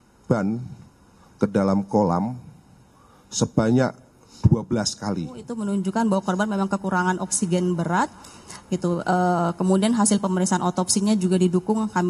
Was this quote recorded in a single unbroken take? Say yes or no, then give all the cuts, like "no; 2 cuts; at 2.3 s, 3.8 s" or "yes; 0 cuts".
no; 1 cut; at 5.5 s